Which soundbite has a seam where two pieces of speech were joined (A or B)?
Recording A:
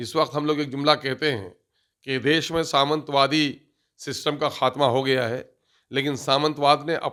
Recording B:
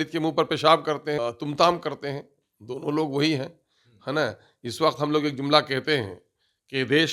B